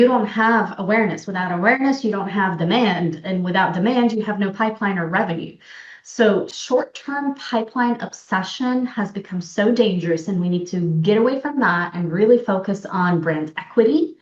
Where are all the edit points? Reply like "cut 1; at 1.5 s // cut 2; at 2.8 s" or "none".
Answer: cut 1; at 6.5 s